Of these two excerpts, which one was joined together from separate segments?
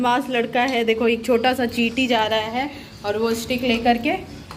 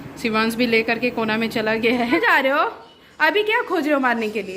second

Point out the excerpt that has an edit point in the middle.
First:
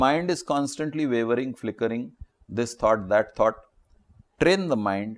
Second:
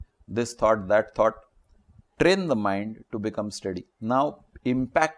second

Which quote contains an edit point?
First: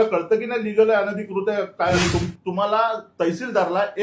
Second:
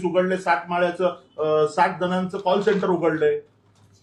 first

